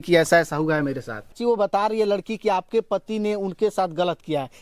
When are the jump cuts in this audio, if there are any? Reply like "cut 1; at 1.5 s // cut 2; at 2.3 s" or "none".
cut 1; at 1.3 s